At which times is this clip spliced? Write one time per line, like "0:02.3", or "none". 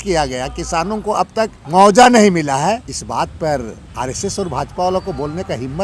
0:01.6
0:02.9
0:03.8